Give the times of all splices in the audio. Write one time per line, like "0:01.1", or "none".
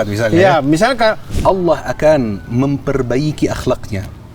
0:01.2